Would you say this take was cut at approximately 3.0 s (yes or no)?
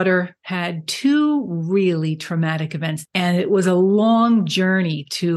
yes